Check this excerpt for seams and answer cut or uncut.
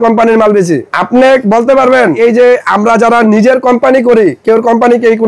cut